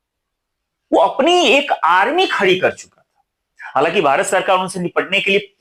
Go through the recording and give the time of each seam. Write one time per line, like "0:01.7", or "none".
none

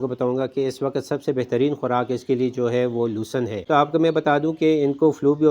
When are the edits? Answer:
0:03.6

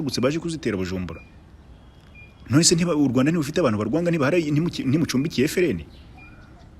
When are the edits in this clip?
none

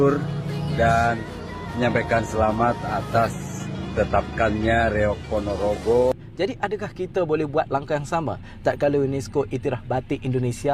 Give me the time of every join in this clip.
0:06.1

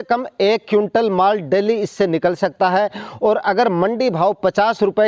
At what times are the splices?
none

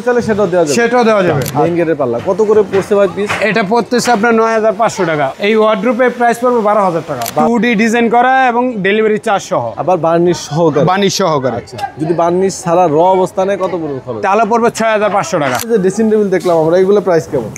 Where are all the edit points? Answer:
0:01.5
0:05.3
0:07.3
0:15.6

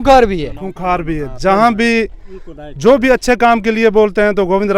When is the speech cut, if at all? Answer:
none

